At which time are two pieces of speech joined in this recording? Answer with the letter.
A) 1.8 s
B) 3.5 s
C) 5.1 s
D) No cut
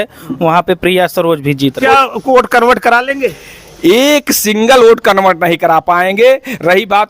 A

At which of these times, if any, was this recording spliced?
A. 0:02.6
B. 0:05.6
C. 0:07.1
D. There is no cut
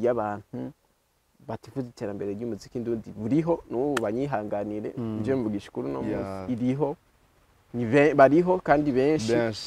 D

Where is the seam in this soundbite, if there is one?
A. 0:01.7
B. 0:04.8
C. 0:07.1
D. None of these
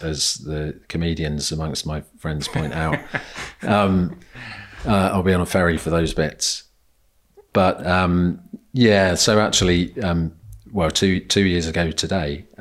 D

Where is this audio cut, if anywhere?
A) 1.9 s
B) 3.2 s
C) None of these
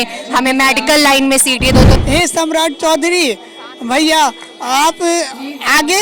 A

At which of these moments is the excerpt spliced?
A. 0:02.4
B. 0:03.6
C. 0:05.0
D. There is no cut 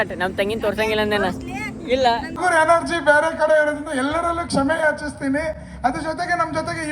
A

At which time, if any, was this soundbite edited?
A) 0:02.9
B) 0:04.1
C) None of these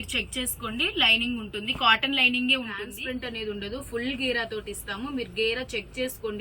A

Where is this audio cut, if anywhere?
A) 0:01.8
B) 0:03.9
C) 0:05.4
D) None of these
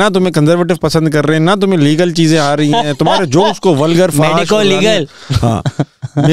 D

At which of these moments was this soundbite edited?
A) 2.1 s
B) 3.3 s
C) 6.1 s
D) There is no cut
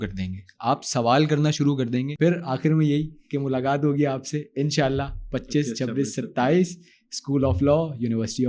A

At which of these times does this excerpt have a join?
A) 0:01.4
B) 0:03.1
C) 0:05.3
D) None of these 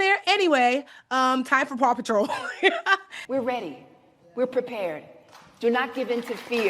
B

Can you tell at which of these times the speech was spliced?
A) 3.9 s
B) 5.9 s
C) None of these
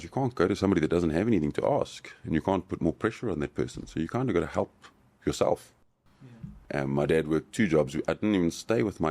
B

